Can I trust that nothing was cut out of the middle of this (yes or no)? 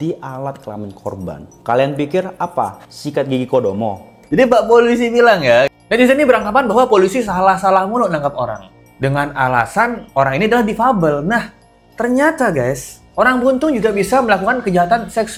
yes